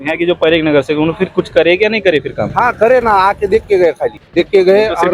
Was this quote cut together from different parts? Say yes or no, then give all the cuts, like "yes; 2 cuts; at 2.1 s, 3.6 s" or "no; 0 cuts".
yes; 1 cut; at 4.1 s